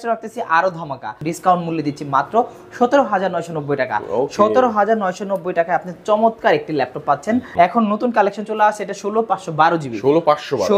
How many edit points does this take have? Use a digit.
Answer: 2